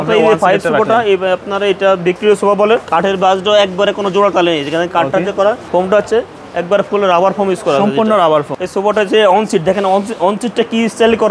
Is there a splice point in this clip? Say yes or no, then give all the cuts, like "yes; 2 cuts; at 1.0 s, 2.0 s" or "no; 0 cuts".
yes; 3 cuts; at 2.9 s, 5.6 s, 8.5 s